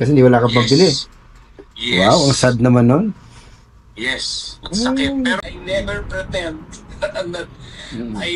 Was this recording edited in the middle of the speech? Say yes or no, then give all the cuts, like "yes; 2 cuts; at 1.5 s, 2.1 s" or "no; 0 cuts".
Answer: yes; 1 cut; at 5.4 s